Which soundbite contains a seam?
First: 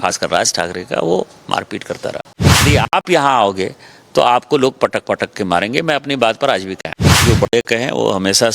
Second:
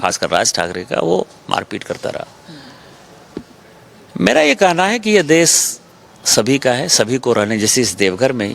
first; 2 cuts; at 2.6 s, 7.2 s

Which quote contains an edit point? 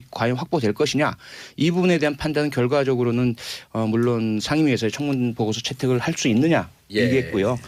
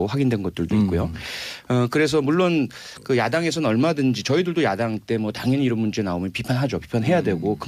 second; 1 cut; at 4.5 s

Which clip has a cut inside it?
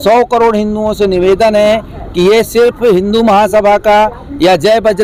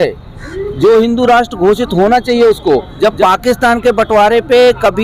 second; 1 cut; at 2.9 s

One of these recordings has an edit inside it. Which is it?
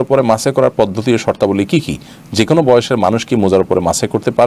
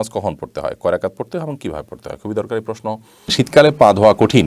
second; 1 cut; at 3.4 s

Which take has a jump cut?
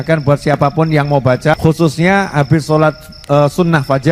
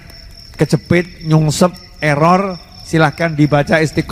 first; 1 cut; at 1.6 s

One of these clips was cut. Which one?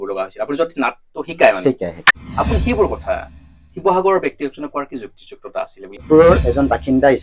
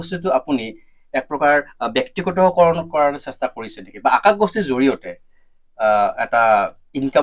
first; 2 cuts; at 2.1 s, 6.0 s

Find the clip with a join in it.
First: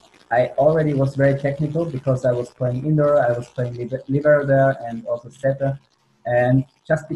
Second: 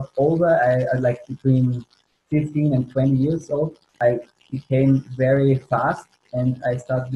second; 1 cut; at 3.8 s

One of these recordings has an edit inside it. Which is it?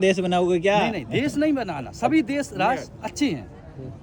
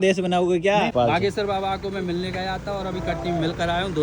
second; 1 cut; at 0.9 s

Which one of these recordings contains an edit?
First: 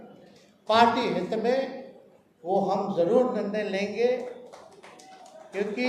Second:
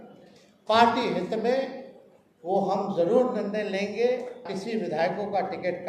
second; 1 cut; at 4.5 s

